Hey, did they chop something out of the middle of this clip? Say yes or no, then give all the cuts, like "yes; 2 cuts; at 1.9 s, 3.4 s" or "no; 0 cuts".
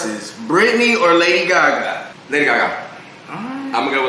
yes; 1 cut; at 2.1 s